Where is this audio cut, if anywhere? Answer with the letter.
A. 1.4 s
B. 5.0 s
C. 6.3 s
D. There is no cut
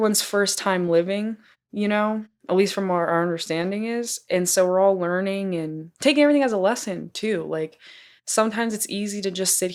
D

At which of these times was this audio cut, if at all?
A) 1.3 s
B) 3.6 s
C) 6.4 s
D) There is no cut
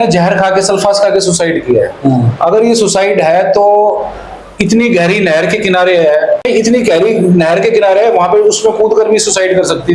C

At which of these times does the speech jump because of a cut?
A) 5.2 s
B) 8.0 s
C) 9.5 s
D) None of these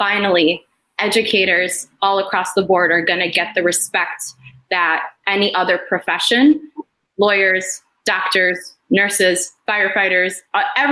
D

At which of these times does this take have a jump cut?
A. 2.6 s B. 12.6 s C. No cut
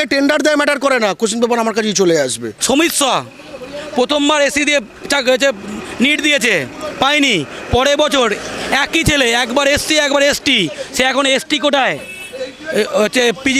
A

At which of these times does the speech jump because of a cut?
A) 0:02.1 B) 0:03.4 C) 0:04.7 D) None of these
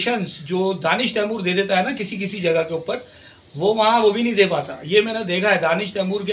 D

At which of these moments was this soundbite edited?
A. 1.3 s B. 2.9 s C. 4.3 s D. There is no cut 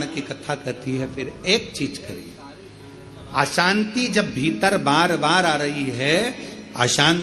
D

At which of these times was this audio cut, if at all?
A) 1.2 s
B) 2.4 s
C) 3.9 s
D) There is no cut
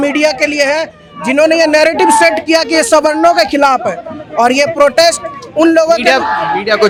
D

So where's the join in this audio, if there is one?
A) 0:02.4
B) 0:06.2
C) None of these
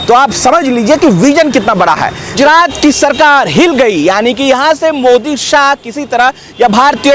A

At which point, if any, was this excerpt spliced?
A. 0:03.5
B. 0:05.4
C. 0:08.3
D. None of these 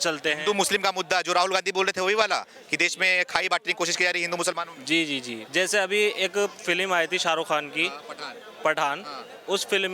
B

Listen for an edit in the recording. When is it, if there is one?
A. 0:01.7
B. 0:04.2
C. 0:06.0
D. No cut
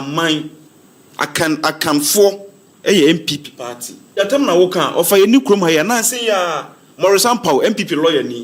B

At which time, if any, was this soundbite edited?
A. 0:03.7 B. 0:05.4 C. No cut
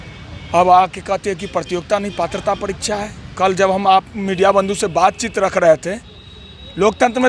C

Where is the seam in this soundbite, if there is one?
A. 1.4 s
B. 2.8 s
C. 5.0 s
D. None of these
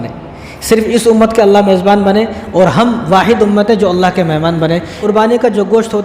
C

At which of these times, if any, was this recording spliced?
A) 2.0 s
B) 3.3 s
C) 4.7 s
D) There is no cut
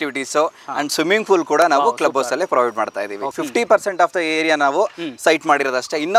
B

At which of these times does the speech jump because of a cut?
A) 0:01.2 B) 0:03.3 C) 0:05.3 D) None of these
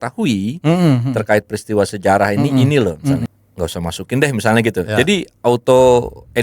B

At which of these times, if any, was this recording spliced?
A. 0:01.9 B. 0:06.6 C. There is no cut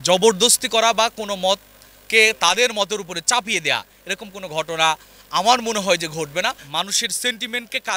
B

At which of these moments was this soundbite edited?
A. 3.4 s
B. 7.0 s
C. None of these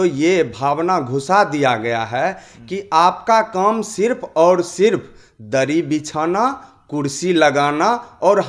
C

